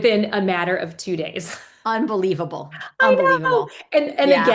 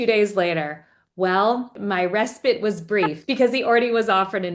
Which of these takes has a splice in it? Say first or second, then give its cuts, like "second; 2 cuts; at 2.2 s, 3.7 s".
second; 2 cuts; at 1.8 s, 3.2 s